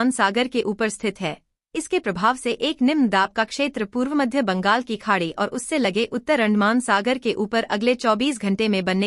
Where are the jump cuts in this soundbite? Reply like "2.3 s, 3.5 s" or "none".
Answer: 7.0 s